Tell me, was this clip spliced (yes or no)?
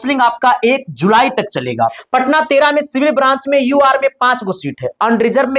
yes